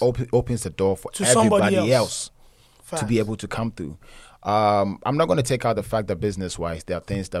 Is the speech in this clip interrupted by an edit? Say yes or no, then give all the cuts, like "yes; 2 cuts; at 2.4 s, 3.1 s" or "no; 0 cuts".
no; 0 cuts